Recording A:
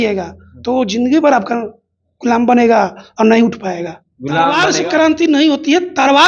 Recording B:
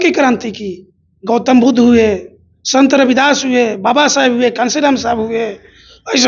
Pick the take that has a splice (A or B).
A